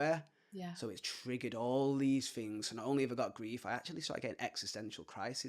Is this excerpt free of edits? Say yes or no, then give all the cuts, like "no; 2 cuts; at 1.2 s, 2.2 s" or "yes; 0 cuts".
yes; 0 cuts